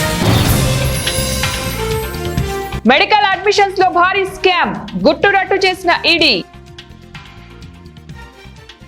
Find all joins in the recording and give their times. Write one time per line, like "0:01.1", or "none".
0:02.7
0:06.4